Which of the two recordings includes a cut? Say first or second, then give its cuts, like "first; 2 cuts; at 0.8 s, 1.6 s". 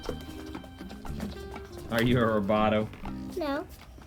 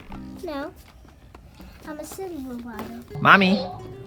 second; 1 cut; at 3.1 s